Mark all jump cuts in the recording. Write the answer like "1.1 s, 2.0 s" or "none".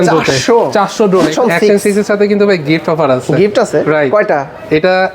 1.3 s